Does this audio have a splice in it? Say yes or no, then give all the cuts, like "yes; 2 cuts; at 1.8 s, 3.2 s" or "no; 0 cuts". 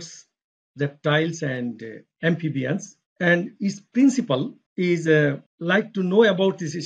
yes; 3 cuts; at 3.0 s, 4.6 s, 5.5 s